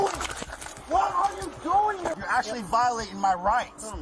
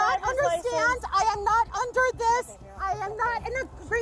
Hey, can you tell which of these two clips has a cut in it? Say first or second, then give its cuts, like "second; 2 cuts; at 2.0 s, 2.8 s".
first; 1 cut; at 2.2 s